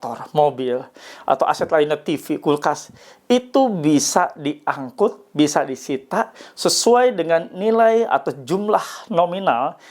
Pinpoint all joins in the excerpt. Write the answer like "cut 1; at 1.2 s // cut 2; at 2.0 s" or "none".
none